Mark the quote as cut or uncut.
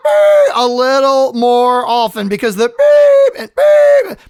uncut